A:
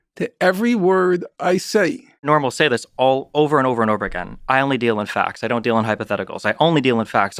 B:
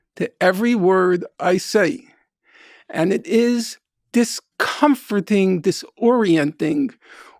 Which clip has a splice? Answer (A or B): A